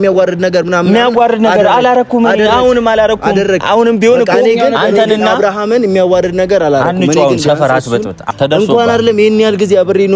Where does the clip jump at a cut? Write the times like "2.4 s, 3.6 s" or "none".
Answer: 8.3 s